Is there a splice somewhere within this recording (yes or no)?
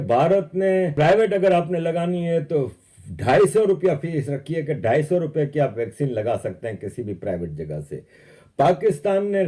yes